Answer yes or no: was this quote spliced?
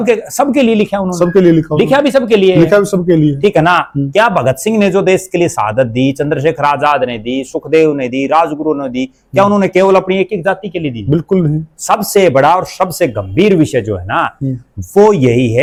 no